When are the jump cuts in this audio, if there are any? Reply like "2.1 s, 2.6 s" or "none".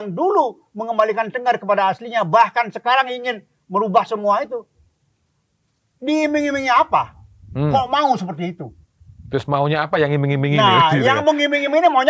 none